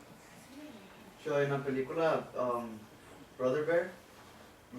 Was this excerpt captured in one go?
no; 1 cut; at 2.1 s

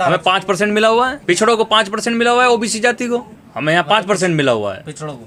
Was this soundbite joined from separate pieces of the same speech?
no; 0 cuts

